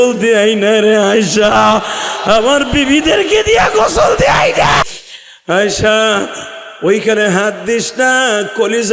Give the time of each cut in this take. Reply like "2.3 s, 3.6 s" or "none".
4.8 s